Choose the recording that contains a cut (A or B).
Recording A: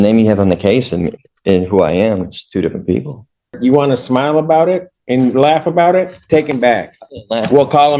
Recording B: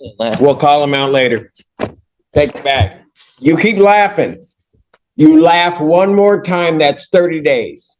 A